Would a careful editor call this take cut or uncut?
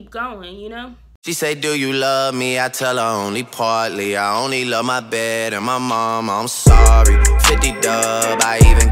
cut